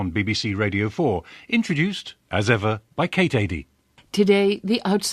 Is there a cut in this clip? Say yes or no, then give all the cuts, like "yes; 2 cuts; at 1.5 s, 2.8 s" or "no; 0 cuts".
no; 0 cuts